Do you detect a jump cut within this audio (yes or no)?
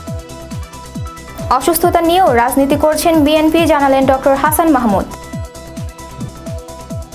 no